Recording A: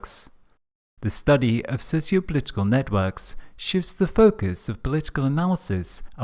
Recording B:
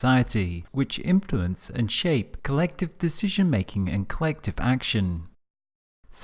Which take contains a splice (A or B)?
A